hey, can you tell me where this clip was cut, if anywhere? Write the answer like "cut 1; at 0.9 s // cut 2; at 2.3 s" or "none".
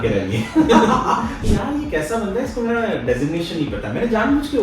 cut 1; at 1.4 s